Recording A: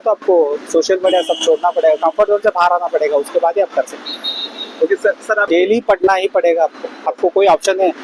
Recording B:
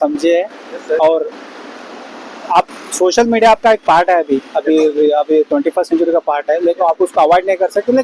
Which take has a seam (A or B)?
A